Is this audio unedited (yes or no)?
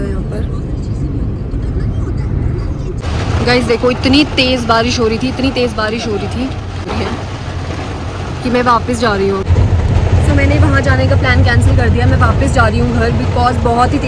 yes